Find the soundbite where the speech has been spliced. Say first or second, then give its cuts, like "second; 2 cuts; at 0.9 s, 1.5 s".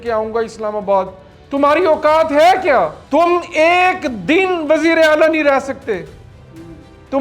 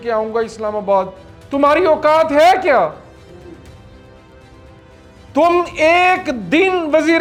first; 1 cut; at 3.0 s